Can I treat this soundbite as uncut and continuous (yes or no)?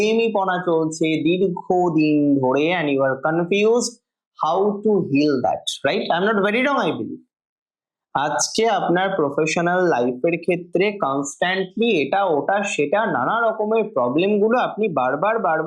yes